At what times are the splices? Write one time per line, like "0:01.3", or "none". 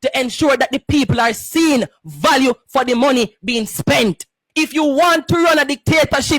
0:04.3